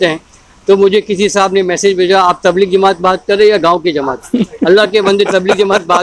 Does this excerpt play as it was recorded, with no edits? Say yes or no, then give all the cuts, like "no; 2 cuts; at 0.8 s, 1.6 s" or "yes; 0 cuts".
yes; 0 cuts